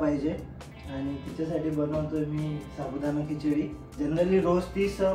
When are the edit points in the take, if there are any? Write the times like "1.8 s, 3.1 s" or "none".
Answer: 3.8 s